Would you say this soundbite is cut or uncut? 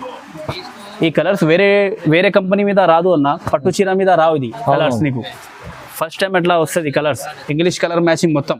uncut